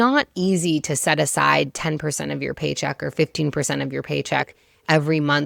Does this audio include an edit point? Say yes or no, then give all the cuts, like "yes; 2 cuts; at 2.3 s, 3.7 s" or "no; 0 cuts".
no; 0 cuts